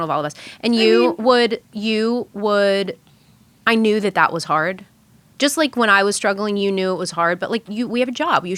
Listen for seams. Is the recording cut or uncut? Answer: uncut